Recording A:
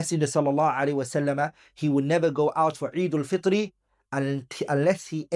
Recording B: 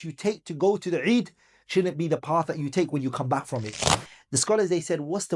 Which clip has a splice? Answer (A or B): B